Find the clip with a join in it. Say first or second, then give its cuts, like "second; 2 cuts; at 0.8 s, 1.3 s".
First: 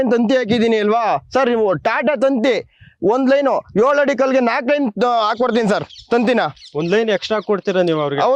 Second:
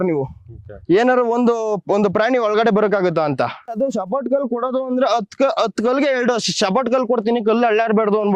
second; 1 cut; at 3.7 s